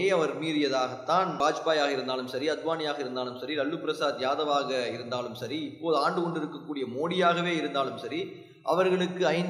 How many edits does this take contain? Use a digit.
1